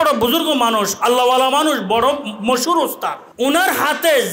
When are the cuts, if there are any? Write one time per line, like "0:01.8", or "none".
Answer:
0:03.2